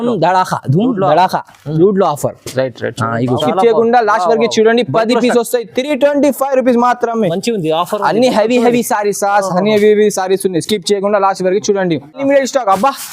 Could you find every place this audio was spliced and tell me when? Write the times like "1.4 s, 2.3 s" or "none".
3.4 s, 12.2 s